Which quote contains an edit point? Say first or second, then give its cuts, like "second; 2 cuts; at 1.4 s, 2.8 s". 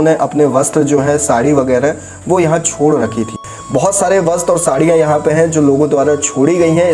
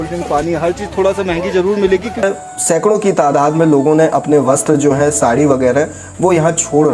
second; 1 cut; at 2.2 s